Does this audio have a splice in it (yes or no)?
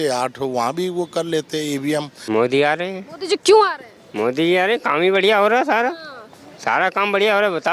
yes